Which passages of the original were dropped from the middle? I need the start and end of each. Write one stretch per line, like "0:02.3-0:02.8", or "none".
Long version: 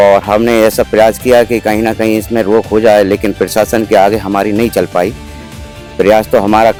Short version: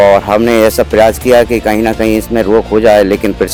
none